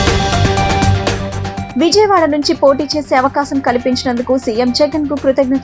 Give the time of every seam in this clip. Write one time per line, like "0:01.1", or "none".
0:01.1